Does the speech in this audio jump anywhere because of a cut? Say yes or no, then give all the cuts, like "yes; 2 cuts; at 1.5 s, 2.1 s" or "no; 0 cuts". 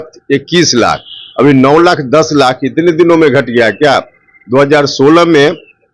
no; 0 cuts